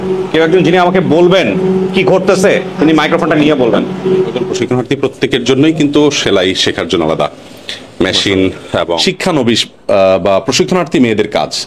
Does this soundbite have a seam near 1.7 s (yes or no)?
no